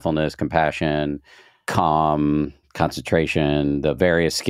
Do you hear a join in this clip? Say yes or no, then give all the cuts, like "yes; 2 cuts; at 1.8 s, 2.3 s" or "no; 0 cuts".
no; 0 cuts